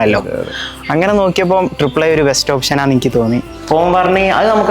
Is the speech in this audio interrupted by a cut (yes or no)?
yes